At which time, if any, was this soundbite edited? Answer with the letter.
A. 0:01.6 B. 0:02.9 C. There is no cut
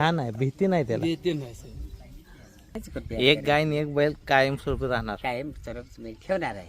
B